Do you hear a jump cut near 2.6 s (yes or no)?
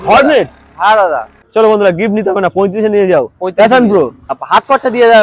no